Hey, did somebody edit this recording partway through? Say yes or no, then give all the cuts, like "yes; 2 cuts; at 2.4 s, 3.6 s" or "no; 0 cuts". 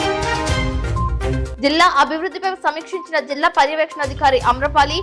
no; 0 cuts